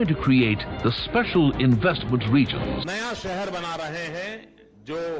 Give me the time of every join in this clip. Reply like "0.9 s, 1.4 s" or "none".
2.9 s